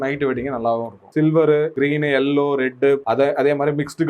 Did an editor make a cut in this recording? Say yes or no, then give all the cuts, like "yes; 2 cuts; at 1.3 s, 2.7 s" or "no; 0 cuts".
yes; 3 cuts; at 1.0 s, 1.7 s, 3.0 s